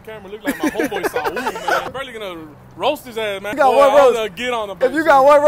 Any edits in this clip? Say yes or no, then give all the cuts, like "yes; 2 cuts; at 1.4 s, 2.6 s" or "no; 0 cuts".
yes; 2 cuts; at 1.9 s, 3.5 s